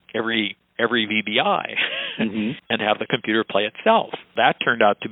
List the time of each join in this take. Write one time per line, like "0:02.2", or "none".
0:02.6
0:04.4